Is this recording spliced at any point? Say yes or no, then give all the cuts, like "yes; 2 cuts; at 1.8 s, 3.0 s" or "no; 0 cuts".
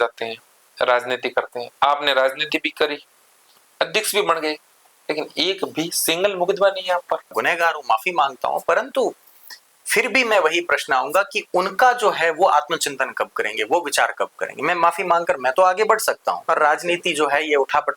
yes; 2 cuts; at 7.3 s, 16.4 s